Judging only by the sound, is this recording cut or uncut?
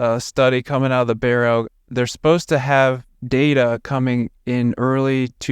cut